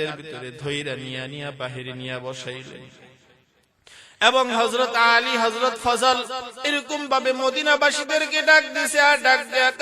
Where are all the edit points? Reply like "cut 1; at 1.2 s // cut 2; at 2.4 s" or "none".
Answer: none

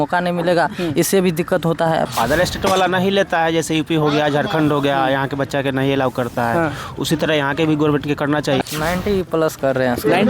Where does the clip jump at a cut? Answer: cut 1; at 2.1 s // cut 2; at 8.6 s

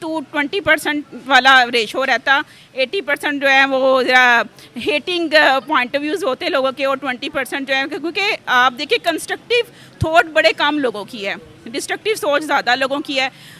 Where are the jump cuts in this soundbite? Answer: none

